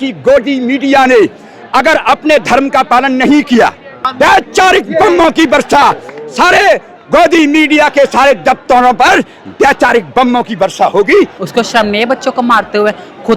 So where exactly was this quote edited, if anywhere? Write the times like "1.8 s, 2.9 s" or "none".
4.1 s, 11.4 s